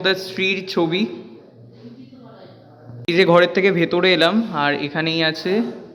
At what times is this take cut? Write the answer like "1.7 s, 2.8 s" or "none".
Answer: 2.9 s